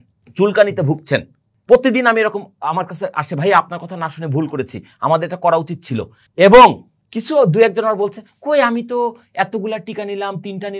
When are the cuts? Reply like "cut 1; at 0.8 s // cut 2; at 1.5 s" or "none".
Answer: none